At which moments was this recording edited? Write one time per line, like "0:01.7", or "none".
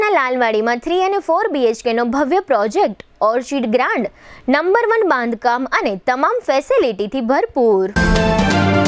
none